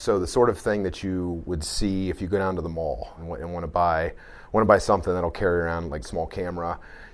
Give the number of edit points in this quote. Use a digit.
2